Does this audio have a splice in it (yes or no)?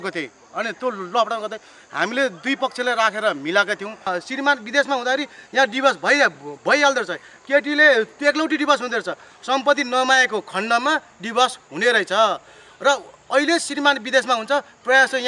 yes